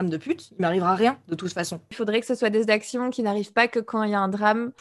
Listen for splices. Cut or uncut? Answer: uncut